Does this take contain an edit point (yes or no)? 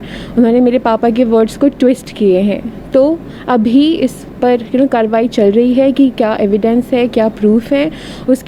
no